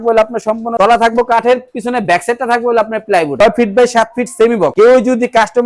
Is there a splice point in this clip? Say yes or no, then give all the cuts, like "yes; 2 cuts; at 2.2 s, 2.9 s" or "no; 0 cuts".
yes; 3 cuts; at 0.7 s, 3.3 s, 4.7 s